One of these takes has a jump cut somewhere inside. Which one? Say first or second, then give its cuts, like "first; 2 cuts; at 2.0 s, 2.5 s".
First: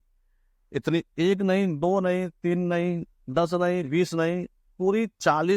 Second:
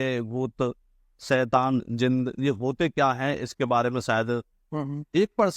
second; 1 cut; at 4.6 s